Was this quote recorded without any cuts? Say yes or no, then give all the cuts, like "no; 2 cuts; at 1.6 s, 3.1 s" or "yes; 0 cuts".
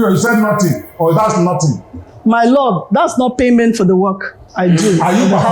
no; 1 cut; at 2.0 s